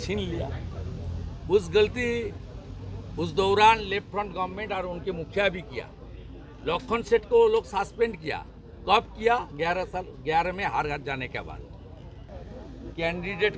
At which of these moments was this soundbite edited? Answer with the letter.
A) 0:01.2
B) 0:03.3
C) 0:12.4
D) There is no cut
C